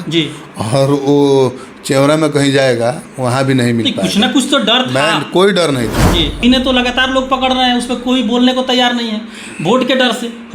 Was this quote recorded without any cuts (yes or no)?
no